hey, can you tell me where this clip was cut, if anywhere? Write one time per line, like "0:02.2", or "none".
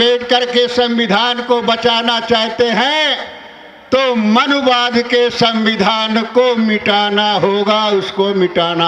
none